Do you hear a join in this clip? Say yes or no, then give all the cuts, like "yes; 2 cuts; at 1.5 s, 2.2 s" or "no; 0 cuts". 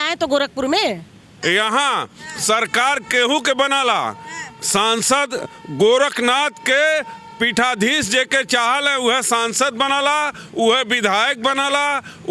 yes; 1 cut; at 1.2 s